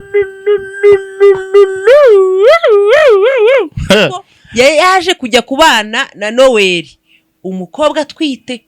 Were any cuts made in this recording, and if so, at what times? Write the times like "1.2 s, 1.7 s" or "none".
4.4 s